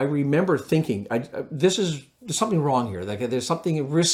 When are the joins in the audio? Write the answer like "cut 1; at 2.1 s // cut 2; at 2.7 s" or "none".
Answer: none